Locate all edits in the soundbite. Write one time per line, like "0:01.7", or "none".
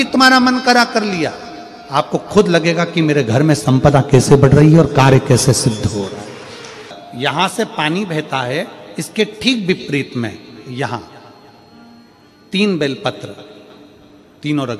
none